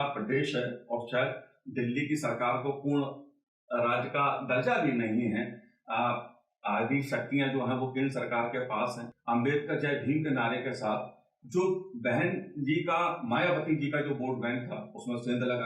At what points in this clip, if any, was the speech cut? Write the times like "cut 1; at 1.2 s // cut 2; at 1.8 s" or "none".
cut 1; at 9.1 s